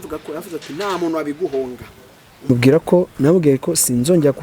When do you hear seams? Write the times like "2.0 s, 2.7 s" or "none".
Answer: 2.5 s